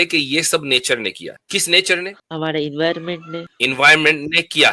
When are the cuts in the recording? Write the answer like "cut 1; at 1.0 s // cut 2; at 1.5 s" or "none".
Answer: cut 1; at 1.3 s // cut 2; at 2.2 s // cut 3; at 3.4 s